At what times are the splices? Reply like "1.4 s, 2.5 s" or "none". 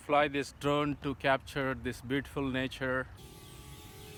none